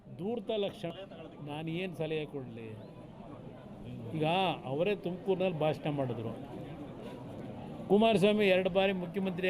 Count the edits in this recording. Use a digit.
1